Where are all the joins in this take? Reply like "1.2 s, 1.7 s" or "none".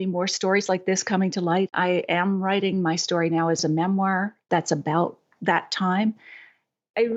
1.7 s, 3.6 s